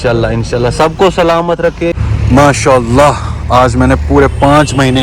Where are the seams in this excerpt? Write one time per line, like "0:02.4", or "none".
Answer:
0:02.0